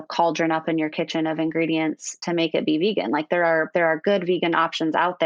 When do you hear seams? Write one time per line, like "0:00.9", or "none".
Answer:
none